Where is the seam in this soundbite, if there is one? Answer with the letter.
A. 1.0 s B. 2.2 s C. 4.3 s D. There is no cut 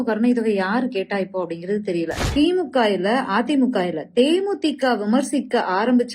B